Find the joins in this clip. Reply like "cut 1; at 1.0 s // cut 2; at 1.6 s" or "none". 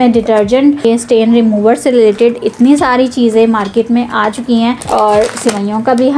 cut 1; at 0.8 s // cut 2; at 4.8 s